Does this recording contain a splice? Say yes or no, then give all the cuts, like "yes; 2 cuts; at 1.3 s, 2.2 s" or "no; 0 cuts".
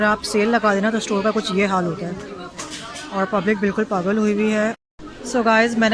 yes; 1 cut; at 4.8 s